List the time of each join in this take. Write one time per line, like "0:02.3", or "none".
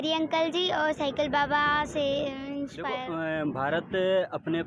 0:03.0